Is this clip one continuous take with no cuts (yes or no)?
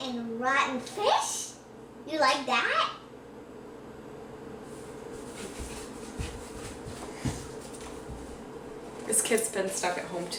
yes